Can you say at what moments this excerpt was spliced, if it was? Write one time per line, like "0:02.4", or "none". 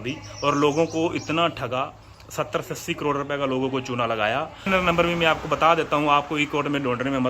0:04.7